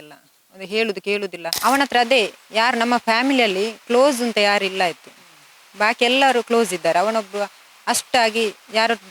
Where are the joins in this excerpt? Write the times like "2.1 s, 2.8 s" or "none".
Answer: 1.5 s